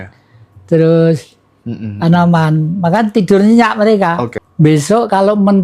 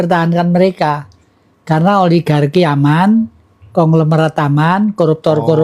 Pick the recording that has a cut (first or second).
first